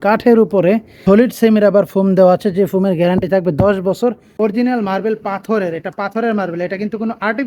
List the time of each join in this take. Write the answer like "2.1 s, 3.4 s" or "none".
0.9 s, 4.3 s